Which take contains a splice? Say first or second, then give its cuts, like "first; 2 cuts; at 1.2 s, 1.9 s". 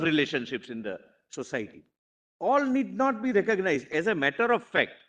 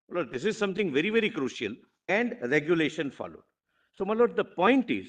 second; 1 cut; at 1.9 s